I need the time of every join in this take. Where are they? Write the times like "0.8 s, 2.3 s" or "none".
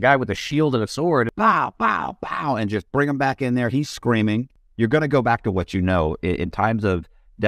1.3 s, 4.6 s